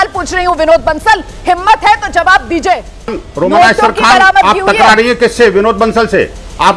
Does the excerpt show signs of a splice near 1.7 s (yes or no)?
no